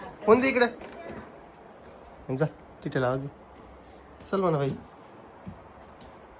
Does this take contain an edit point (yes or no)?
no